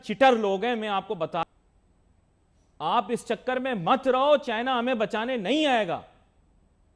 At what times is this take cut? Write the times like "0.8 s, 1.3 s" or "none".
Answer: 1.4 s